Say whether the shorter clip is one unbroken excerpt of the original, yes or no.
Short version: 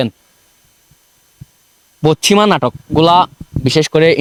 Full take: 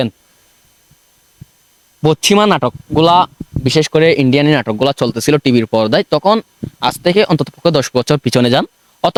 yes